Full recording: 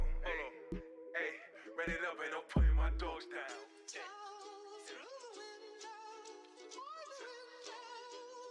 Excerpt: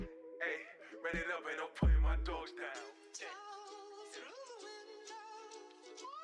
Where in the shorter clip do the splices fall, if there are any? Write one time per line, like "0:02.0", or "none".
none